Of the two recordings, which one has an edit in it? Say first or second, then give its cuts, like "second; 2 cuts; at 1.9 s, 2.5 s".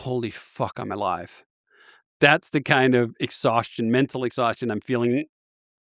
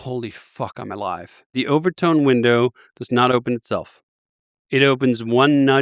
second; 1 cut; at 1.5 s